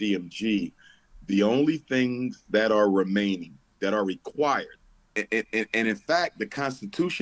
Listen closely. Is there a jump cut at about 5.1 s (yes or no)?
yes